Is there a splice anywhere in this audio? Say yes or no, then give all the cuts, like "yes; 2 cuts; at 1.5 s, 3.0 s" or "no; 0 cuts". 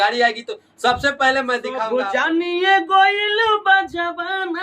yes; 1 cut; at 1.8 s